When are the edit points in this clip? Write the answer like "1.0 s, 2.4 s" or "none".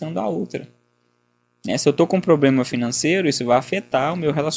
none